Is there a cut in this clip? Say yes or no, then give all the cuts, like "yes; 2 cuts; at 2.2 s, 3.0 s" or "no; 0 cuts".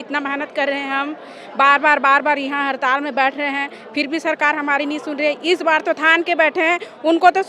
no; 0 cuts